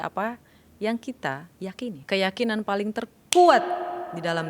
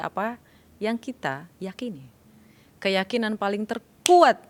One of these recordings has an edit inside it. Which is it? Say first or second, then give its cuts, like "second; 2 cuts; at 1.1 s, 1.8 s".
first; 1 cut; at 2.0 s